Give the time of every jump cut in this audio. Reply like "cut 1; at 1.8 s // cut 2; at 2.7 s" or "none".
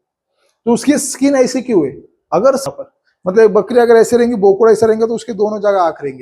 cut 1; at 2.6 s